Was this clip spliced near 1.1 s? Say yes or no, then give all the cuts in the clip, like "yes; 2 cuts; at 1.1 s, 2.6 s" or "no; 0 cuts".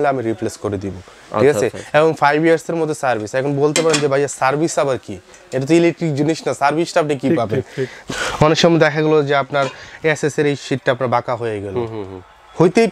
no; 0 cuts